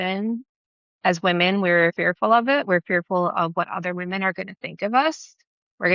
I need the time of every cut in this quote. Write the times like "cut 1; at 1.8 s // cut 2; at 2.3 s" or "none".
cut 1; at 2.0 s